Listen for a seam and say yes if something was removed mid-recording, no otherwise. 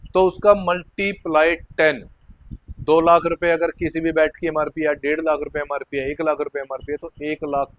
no